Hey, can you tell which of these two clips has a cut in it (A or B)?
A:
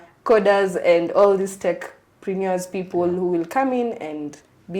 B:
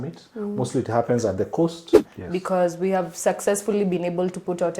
B